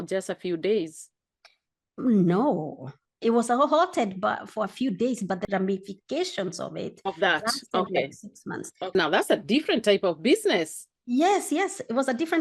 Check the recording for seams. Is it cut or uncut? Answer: cut